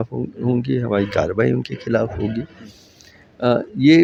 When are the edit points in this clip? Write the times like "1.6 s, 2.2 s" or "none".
none

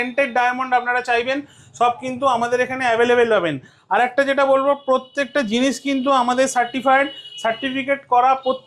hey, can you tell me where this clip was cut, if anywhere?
none

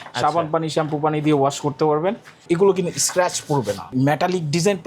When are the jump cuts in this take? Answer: 2.4 s, 3.9 s

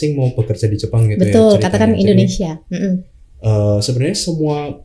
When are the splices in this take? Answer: none

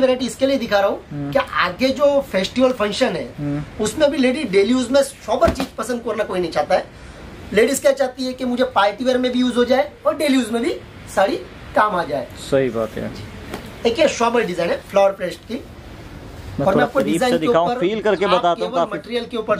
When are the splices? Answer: none

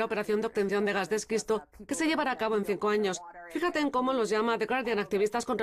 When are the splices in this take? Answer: none

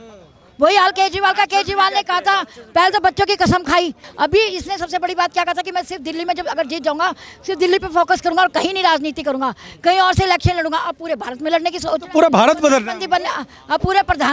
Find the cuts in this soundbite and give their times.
4.0 s

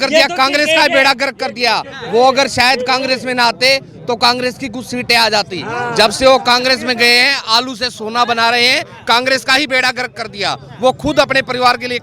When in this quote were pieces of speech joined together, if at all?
none

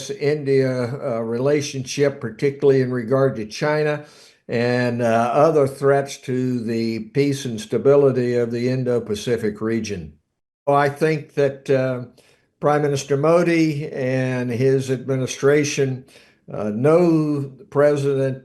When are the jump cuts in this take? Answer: 10.7 s

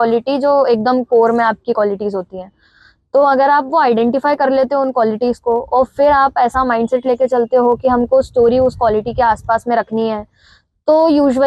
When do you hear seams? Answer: none

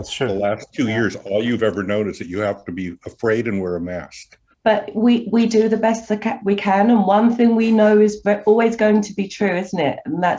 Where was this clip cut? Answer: 4.5 s

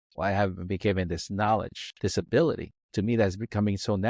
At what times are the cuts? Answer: none

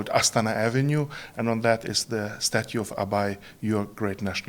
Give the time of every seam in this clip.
none

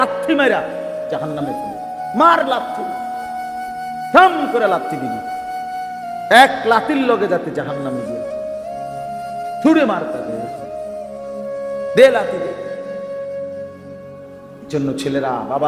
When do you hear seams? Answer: 2.6 s, 4.1 s, 5.0 s, 6.3 s

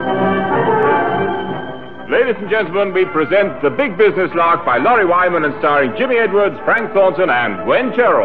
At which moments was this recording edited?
none

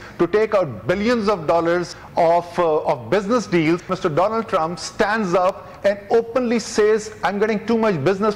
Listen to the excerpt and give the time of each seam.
2.0 s, 3.9 s

